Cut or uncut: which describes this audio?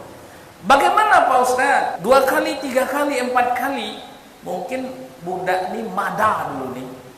cut